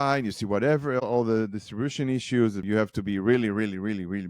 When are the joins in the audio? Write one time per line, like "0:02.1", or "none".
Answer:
0:02.6